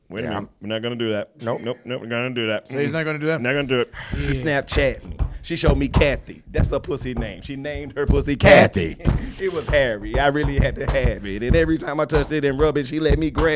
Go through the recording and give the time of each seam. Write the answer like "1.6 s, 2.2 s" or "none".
4.1 s